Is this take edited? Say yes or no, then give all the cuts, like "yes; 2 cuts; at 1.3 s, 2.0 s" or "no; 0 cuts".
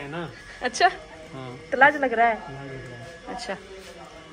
no; 0 cuts